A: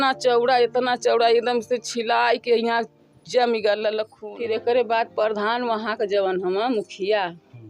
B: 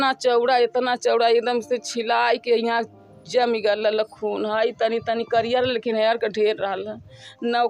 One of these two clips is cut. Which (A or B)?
A